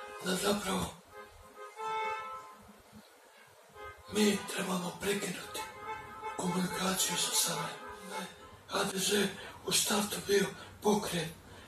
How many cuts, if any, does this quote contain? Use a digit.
1